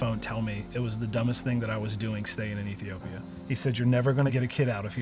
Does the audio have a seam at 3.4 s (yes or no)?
yes